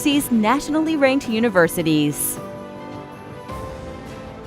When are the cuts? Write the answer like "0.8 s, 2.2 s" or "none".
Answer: 2.2 s